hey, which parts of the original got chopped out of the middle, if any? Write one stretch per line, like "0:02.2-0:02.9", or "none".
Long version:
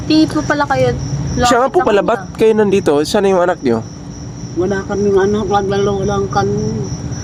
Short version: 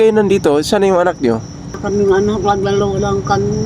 0:04.2-0:04.8